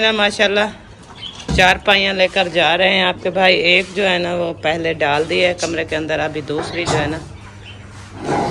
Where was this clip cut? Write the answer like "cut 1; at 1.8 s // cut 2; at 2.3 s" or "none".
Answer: none